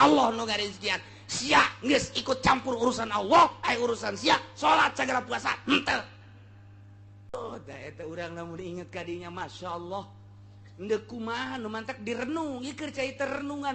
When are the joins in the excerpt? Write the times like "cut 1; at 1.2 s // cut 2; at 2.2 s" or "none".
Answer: cut 1; at 7.3 s